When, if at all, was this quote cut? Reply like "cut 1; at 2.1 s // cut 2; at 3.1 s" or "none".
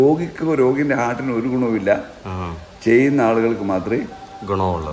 none